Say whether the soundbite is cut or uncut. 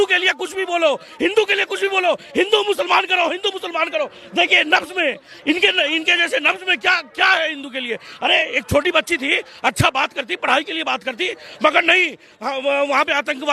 uncut